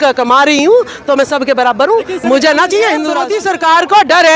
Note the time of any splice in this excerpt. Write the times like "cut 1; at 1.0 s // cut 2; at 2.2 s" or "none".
cut 1; at 3.3 s